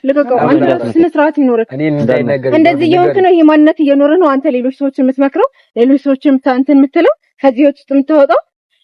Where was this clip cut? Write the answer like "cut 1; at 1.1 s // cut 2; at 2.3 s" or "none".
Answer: none

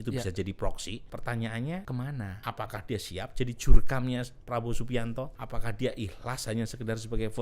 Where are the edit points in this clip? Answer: cut 1; at 1.1 s // cut 2; at 2.1 s // cut 3; at 5.4 s

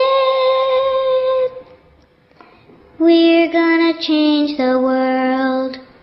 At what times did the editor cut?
cut 1; at 4.5 s

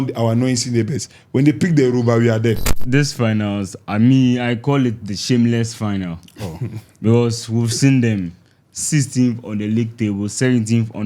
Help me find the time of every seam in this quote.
cut 1; at 2.7 s

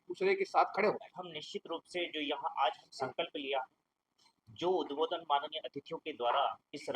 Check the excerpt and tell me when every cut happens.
cut 1; at 1.1 s

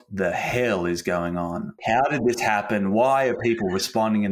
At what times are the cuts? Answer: cut 1; at 1.9 s

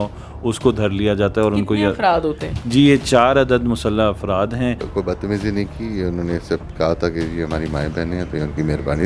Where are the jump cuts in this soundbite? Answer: cut 1; at 4.8 s

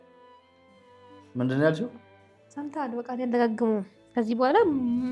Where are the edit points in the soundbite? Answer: cut 1; at 1.3 s

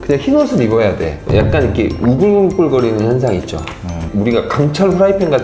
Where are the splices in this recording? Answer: cut 1; at 1.2 s

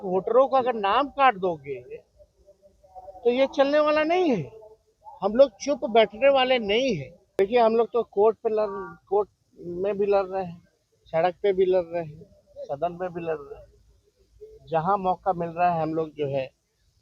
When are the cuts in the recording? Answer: cut 1; at 7.2 s

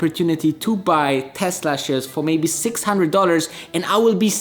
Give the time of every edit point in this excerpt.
none

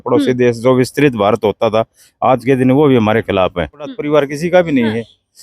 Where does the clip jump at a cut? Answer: cut 1; at 4.0 s

